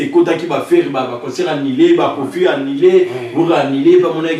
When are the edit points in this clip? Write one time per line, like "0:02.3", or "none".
none